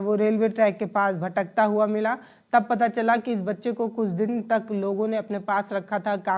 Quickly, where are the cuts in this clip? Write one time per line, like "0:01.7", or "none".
none